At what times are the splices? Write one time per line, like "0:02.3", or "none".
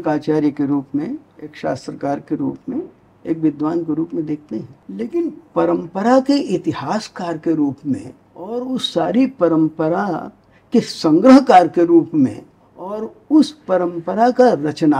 0:01.6
0:04.8
0:08.8
0:13.1